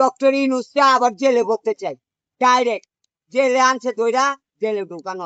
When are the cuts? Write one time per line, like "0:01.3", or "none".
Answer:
none

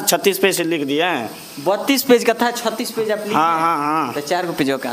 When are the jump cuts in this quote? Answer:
none

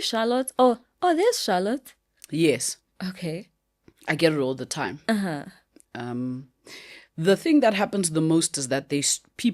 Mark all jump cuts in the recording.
none

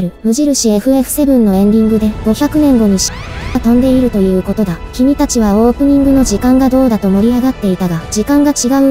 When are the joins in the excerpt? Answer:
0:04.8

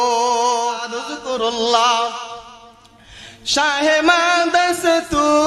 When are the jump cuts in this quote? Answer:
0:00.9

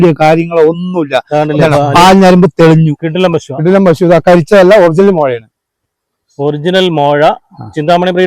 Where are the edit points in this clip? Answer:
0:03.0

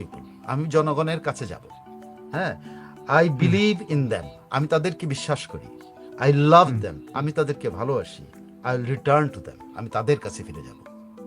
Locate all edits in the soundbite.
0:10.4

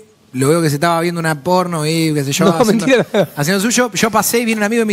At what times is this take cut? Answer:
none

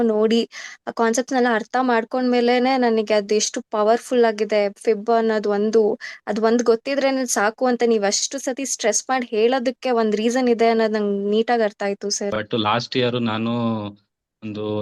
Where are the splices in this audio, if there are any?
0:12.3

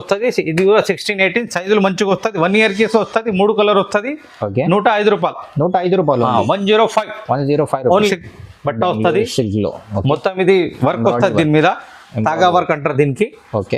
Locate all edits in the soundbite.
0:08.1

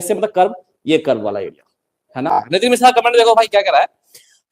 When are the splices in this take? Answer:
0:02.5

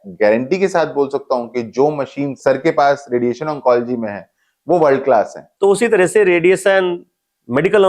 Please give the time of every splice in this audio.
0:02.4
0:05.4

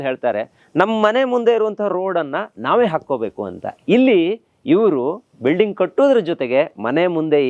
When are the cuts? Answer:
none

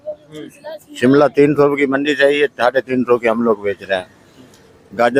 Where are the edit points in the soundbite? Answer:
none

